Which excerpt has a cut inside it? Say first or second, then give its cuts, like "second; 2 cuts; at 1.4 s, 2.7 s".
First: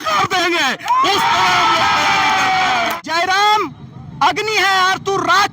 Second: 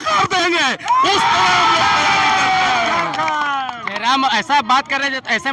first; 1 cut; at 3.0 s